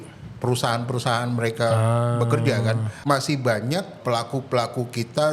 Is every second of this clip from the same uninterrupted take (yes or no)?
no